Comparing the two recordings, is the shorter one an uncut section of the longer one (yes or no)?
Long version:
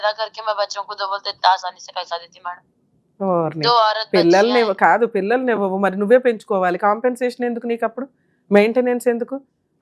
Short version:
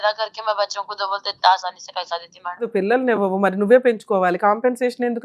no